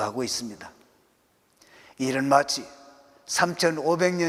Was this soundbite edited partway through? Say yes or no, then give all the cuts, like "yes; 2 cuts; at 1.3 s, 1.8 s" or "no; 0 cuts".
no; 0 cuts